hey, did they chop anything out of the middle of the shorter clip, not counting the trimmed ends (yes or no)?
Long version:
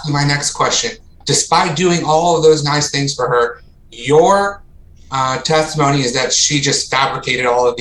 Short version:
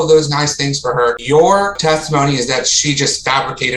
yes